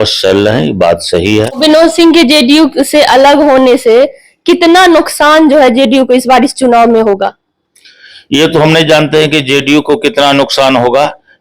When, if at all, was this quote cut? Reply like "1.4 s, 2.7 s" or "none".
1.2 s